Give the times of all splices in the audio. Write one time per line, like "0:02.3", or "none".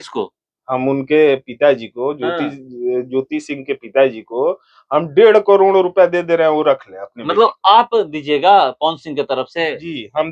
none